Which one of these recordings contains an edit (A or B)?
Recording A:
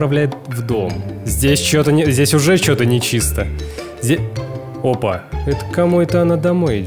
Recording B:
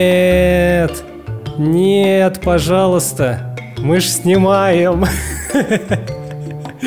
A